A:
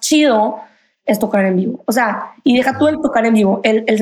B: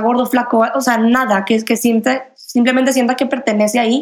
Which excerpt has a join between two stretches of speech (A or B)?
A